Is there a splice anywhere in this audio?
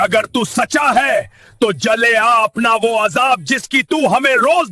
no; 0 cuts

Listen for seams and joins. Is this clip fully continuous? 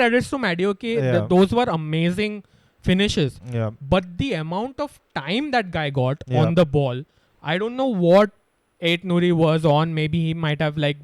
yes; 0 cuts

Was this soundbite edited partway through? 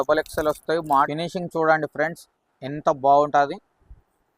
yes; 1 cut; at 1.1 s

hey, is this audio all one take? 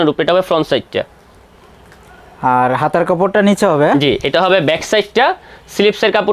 yes; 0 cuts

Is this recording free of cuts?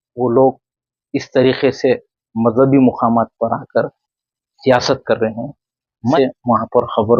no; 1 cut; at 6.2 s

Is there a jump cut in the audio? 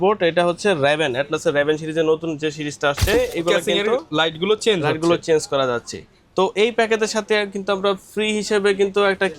yes; 1 cut; at 3.1 s

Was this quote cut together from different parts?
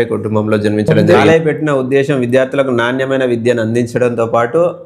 yes; 1 cut; at 1.1 s

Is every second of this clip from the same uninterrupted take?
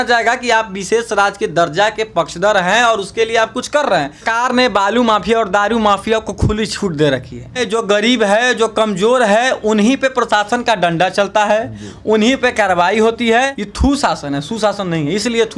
no; 3 cuts; at 4.3 s, 7.6 s, 13.6 s

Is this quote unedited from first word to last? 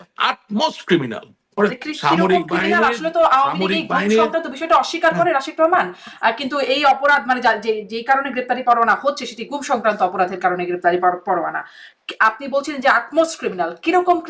no; 1 cut; at 1.6 s

